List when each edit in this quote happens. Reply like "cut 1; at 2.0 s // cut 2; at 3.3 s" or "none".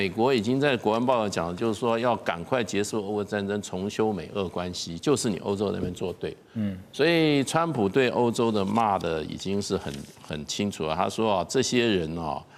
none